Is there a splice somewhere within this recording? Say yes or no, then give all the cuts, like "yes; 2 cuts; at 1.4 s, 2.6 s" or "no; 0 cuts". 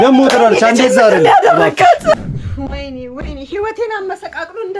yes; 1 cut; at 2.2 s